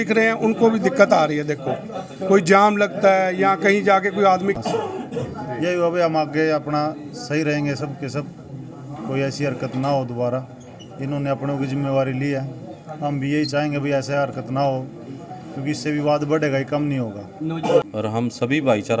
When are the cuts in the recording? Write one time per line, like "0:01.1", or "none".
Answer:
0:04.6
0:17.8